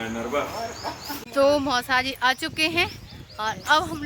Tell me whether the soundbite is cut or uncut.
cut